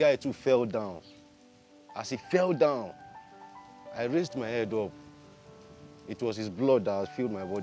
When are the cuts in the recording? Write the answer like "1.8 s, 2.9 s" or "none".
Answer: none